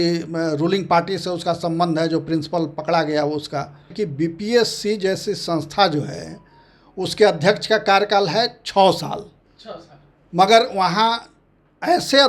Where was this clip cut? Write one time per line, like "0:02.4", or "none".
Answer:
0:03.9